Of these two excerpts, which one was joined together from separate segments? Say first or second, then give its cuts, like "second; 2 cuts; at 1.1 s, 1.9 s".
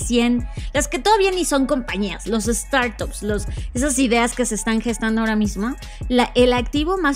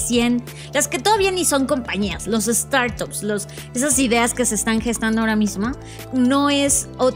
second; 1 cut; at 5.9 s